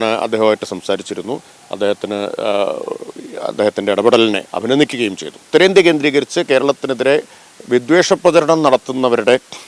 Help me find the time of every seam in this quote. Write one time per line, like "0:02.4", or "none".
0:05.4